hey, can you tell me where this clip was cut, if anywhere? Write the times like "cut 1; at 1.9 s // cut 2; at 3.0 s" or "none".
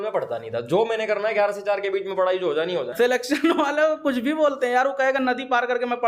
cut 1; at 2.9 s